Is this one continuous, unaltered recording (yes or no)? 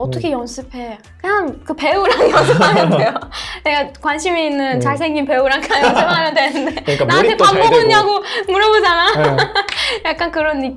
yes